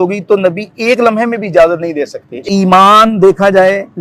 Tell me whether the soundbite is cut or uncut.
cut